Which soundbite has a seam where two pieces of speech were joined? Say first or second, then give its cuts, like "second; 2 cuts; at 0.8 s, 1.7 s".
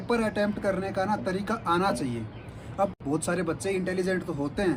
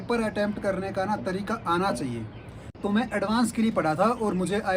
second; 1 cut; at 2.6 s